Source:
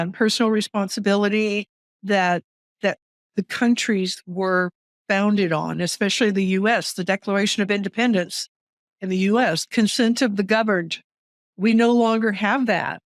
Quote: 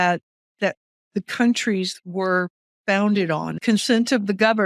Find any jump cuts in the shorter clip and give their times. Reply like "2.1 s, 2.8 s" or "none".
3.6 s